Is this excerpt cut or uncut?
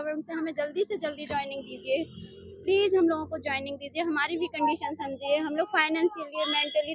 uncut